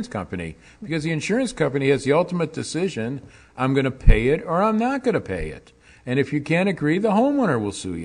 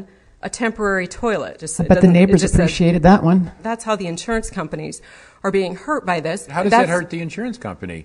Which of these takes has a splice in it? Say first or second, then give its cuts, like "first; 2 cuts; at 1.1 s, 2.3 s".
second; 3 cuts; at 1.6 s, 3.6 s, 6.5 s